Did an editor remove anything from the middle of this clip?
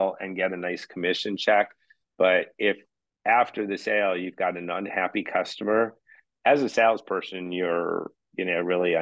no; 0 cuts

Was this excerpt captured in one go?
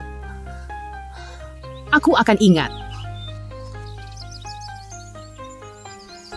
no; 2 cuts; at 2.7 s, 4.9 s

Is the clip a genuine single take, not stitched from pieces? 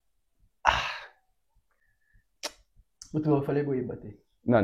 yes; 0 cuts

